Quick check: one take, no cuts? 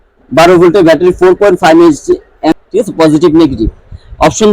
no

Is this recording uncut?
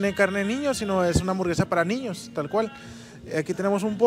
yes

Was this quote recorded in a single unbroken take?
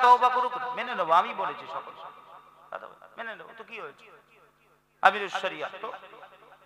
yes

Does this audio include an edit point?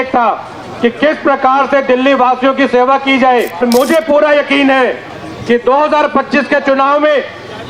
yes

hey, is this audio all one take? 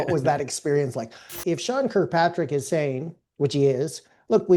no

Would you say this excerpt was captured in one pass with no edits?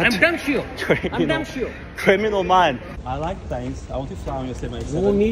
no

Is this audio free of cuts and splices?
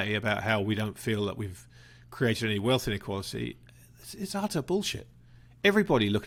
yes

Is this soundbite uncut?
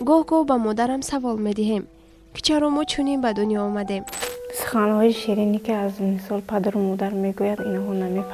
no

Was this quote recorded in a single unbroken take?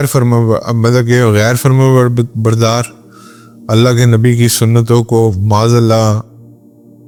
yes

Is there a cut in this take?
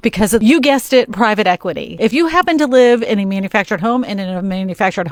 no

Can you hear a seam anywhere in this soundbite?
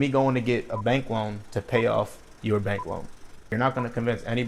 yes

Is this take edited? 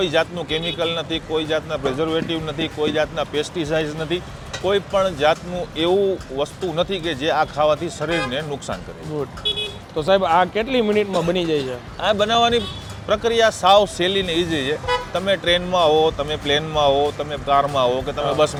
no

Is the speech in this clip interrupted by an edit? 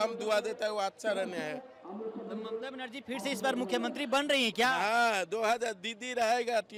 no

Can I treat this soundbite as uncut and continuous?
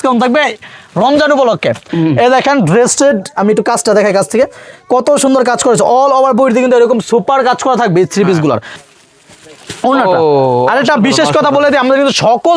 no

